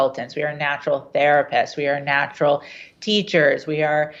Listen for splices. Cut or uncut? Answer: uncut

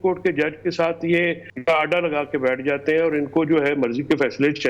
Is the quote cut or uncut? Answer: cut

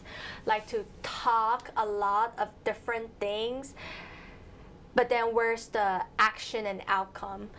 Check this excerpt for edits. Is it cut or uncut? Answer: uncut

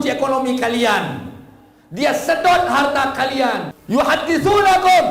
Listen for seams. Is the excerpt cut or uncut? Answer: cut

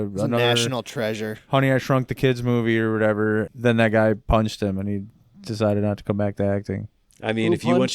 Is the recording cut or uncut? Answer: cut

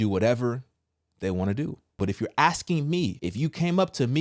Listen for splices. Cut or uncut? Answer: cut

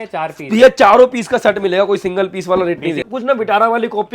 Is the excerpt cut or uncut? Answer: cut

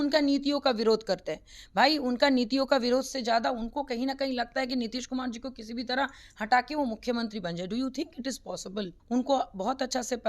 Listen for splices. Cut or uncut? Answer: cut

